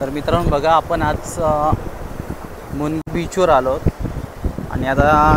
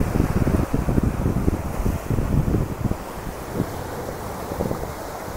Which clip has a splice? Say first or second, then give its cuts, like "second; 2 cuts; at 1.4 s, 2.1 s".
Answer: first; 1 cut; at 3.1 s